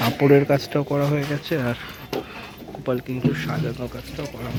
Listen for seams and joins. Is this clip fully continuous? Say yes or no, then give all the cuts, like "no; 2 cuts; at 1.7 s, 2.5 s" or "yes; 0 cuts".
yes; 0 cuts